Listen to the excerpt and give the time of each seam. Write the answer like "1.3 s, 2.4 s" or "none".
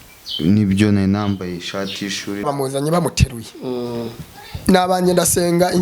2.4 s